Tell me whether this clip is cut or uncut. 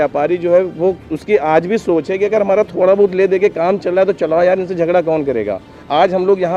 uncut